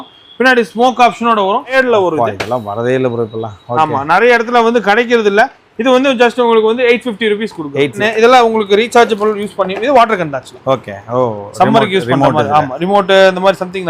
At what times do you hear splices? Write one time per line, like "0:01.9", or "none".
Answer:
0:01.7
0:08.0